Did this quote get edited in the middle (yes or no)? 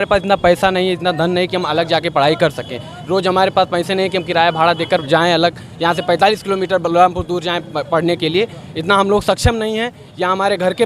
no